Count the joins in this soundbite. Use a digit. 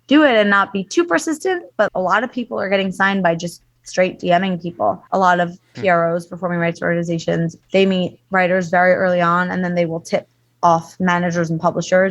3